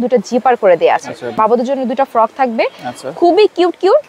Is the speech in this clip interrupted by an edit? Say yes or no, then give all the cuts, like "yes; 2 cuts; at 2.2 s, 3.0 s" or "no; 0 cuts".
yes; 1 cut; at 1.4 s